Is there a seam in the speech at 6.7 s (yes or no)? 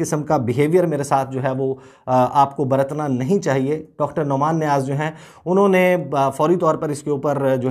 no